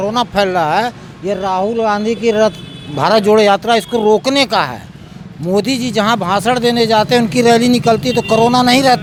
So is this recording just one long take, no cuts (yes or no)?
yes